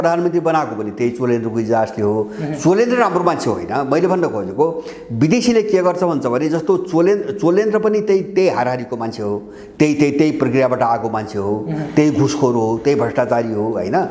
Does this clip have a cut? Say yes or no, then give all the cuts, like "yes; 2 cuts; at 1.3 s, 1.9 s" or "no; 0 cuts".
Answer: no; 0 cuts